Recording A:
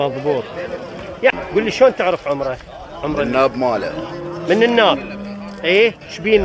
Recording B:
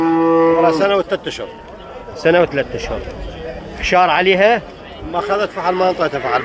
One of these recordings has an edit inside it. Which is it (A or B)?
A